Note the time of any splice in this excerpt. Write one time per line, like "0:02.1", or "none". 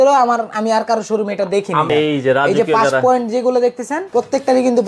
0:01.9
0:03.9